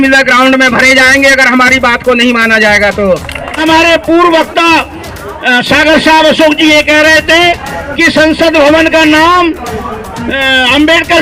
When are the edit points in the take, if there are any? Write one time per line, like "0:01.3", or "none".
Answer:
0:03.6